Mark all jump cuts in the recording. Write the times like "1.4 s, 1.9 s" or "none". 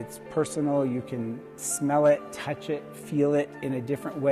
none